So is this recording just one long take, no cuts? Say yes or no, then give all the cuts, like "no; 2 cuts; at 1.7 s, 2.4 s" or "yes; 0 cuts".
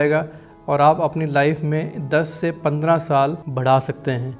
no; 1 cut; at 3.5 s